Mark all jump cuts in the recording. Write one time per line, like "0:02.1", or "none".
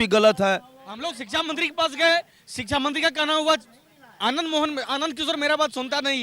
0:01.1